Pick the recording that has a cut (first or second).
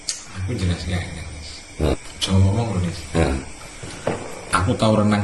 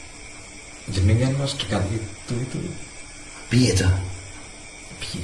first